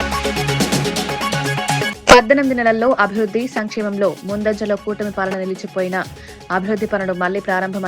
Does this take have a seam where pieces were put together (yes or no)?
yes